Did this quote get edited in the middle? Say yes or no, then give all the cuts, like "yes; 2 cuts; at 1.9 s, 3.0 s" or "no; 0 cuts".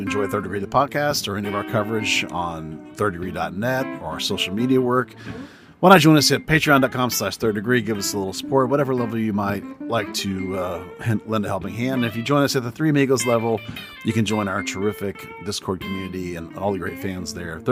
no; 0 cuts